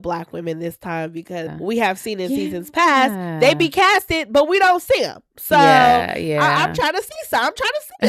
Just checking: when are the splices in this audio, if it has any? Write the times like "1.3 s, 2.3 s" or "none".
1.5 s